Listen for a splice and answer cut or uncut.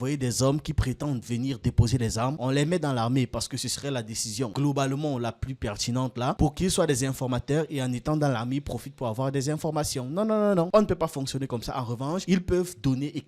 uncut